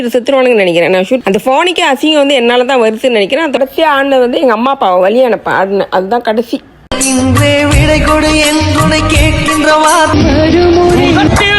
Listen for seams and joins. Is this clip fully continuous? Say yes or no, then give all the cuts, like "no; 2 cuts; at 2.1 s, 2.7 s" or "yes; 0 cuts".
no; 3 cuts; at 1.2 s, 3.6 s, 10.1 s